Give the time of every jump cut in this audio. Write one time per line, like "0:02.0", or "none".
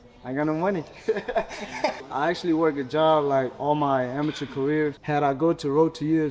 0:02.0
0:05.0